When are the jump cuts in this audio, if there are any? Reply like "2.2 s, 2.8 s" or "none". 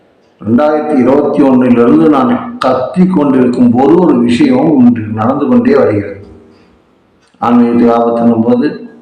none